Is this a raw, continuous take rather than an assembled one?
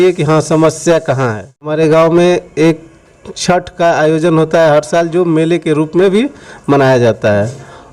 no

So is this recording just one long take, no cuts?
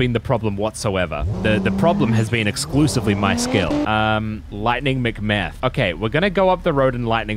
no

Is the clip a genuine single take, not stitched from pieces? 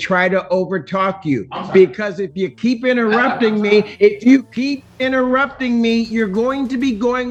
yes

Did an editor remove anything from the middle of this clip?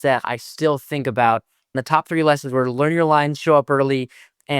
yes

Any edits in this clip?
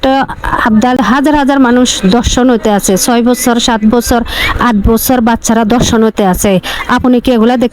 yes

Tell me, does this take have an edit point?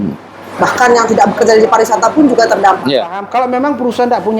yes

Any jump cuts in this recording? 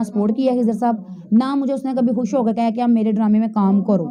no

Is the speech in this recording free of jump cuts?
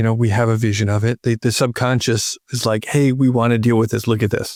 yes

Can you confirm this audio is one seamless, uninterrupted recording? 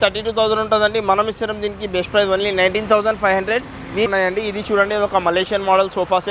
no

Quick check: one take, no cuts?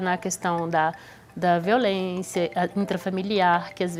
yes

